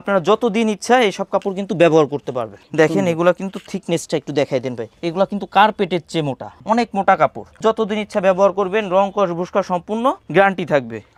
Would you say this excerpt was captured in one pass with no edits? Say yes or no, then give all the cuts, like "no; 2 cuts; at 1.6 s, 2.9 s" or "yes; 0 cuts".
yes; 0 cuts